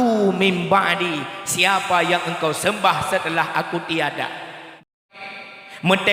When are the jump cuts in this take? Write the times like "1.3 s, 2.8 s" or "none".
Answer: 4.8 s

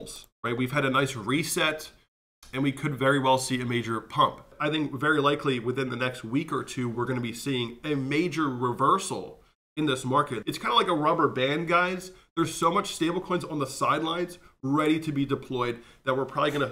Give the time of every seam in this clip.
4.5 s, 10.4 s

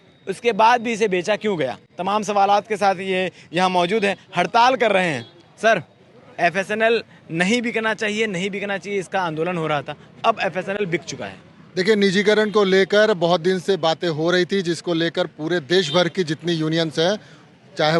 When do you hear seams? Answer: none

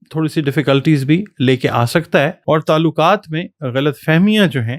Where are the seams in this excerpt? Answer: 2.4 s

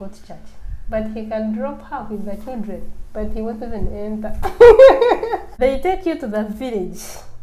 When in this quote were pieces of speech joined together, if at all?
5.5 s

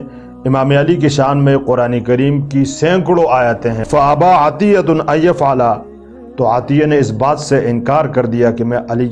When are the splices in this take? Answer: 3.8 s

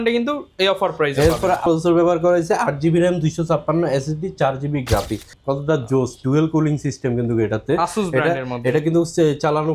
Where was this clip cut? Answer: 1.7 s, 5.3 s

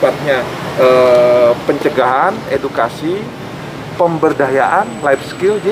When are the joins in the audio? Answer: none

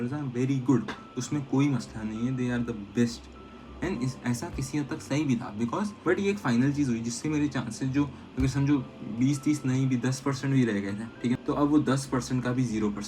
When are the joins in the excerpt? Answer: 6.0 s, 11.4 s

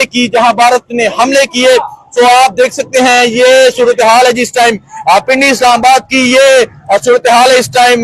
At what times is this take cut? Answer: none

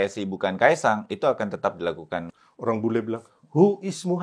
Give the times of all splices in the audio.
2.2 s

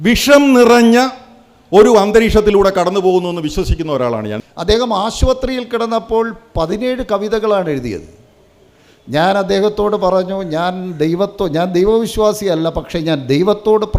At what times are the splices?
4.4 s

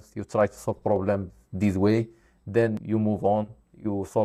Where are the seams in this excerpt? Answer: none

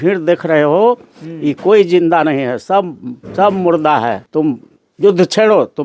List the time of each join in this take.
4.2 s

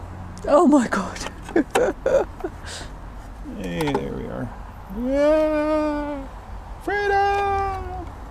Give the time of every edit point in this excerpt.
none

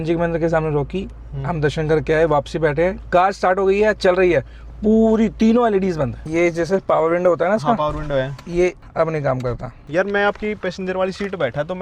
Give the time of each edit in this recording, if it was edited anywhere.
6.2 s, 8.8 s, 9.8 s

